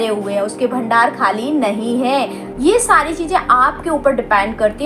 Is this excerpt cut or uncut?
cut